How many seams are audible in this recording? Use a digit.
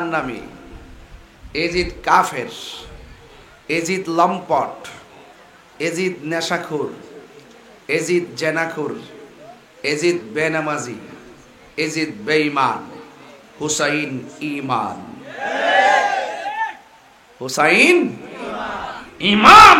0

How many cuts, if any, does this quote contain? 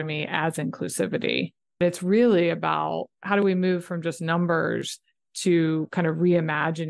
2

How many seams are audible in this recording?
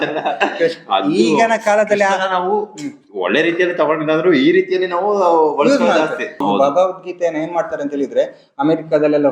1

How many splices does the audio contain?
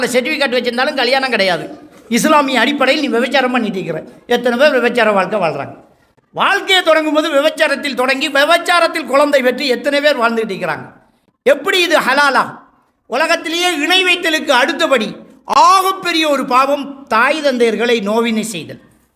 0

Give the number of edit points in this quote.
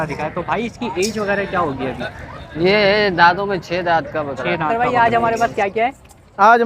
1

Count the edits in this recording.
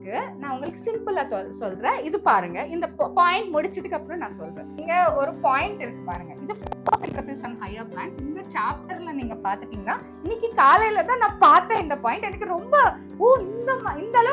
1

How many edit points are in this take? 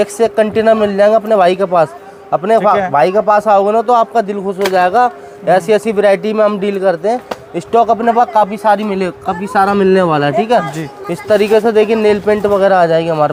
0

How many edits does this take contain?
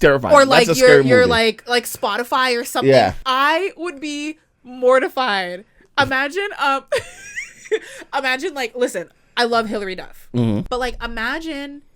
2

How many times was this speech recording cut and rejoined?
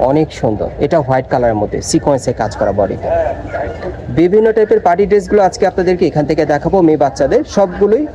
0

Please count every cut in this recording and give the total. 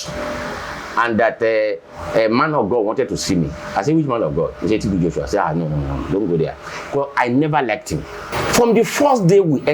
1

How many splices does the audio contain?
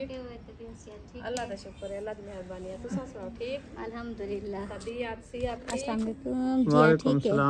0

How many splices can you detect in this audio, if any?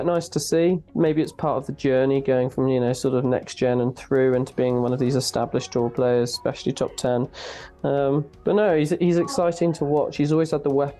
0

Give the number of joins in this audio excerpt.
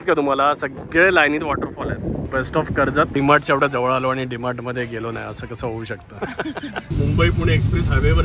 3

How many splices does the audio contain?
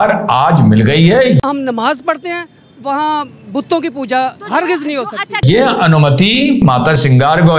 3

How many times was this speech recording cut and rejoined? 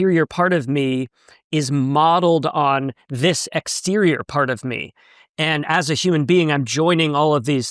0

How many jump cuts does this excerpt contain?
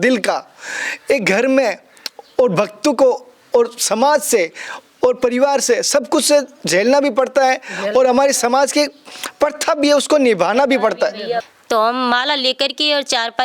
1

